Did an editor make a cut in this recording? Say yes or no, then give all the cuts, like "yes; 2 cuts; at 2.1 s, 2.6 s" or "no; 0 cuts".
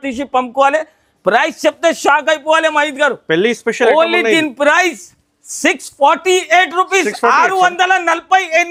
no; 0 cuts